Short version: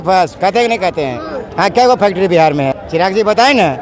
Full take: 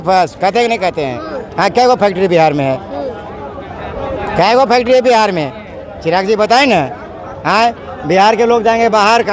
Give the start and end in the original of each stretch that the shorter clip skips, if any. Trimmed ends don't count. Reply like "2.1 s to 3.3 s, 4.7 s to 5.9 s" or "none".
2.8 s to 5.9 s